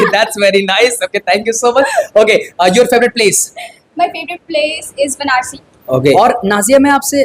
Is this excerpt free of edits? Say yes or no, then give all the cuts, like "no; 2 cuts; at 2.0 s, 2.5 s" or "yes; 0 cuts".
no; 1 cut; at 6.1 s